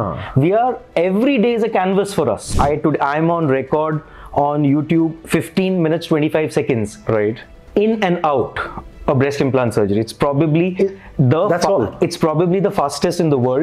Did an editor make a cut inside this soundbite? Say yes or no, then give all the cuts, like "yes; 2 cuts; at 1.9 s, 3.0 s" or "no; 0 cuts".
yes; 1 cut; at 2.4 s